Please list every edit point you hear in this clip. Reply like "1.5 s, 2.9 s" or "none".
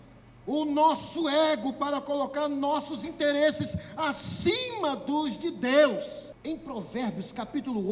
6.3 s